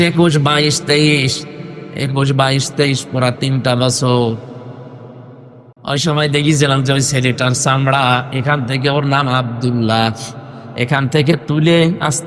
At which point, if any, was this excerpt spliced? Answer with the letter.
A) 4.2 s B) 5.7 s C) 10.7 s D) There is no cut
B